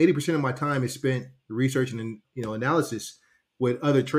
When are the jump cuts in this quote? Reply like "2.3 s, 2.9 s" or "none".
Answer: 2.2 s